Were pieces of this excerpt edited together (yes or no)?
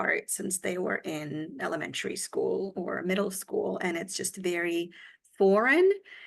no